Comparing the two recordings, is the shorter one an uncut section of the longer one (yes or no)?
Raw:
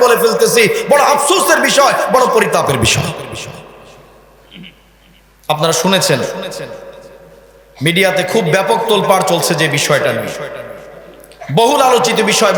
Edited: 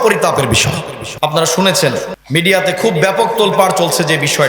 no